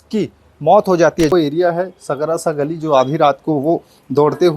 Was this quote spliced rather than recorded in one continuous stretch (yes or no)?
yes